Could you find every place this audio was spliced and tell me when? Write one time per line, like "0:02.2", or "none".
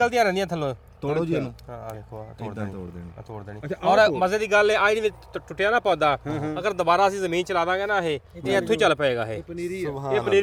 none